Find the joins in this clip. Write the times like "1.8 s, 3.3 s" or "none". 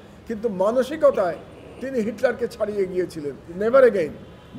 3.4 s